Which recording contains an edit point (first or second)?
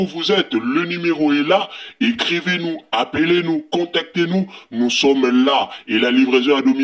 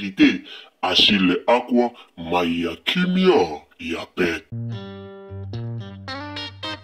second